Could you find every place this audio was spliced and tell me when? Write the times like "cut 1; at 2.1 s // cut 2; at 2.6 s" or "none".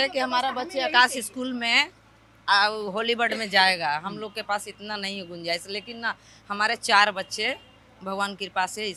none